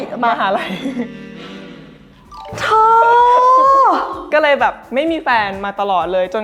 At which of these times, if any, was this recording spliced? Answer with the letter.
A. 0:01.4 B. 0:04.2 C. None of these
B